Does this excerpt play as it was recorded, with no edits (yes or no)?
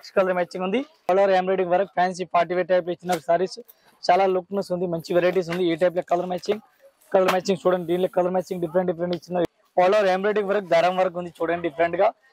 no